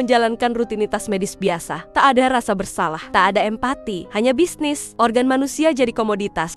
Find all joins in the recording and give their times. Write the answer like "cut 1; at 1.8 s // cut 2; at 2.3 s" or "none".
cut 1; at 1.8 s // cut 2; at 3.0 s // cut 3; at 4.0 s // cut 4; at 4.8 s

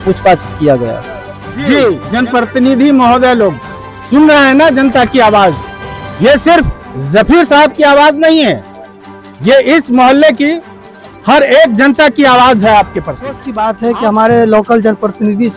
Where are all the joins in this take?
cut 1; at 2.0 s // cut 2; at 13.5 s

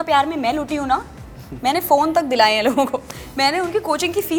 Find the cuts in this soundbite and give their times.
none

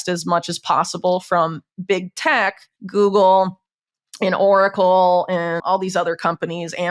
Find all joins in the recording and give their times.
cut 1; at 2.7 s // cut 2; at 5.6 s

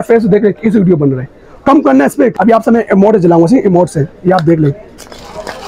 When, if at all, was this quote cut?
cut 1; at 2.3 s

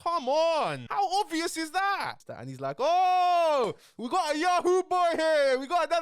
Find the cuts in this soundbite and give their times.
cut 1; at 0.8 s // cut 2; at 2.2 s

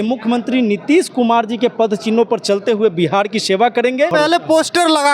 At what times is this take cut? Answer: cut 1; at 4.1 s

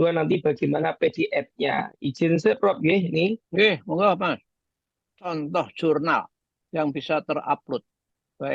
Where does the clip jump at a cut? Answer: cut 1; at 5.3 s

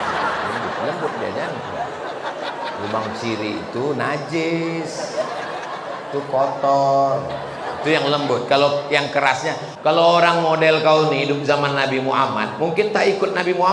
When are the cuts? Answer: cut 1; at 9.7 s

